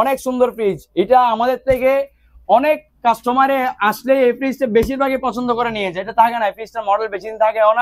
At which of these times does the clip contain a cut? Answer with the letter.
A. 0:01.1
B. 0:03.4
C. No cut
C